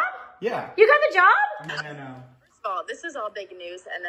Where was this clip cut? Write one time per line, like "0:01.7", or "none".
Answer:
0:01.7